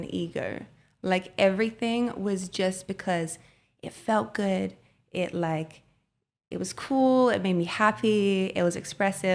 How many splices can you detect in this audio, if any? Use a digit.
0